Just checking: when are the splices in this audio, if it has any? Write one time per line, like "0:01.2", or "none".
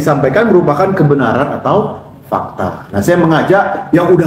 0:02.8